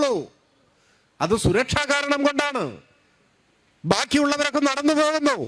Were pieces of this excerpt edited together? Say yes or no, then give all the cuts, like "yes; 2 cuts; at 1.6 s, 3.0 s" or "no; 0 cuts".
no; 0 cuts